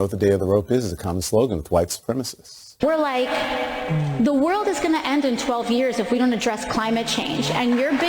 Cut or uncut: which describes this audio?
cut